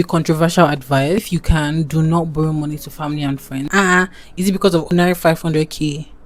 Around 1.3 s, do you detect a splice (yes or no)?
yes